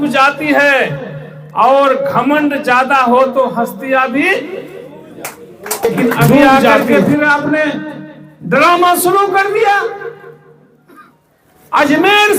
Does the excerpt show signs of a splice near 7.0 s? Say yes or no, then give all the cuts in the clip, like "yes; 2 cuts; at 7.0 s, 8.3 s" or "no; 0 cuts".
yes; 1 cut; at 7.0 s